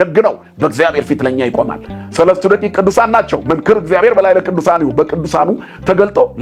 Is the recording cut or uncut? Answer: uncut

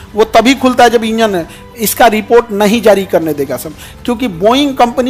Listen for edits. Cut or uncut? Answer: uncut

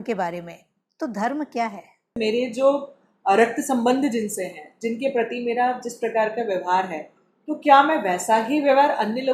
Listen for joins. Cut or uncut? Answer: cut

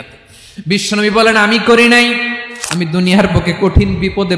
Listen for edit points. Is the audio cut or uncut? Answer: cut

